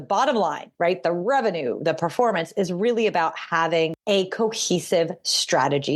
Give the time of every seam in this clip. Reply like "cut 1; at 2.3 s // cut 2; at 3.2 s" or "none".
cut 1; at 4.0 s